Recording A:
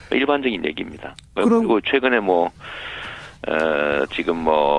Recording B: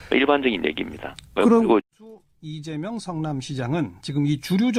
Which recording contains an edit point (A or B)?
A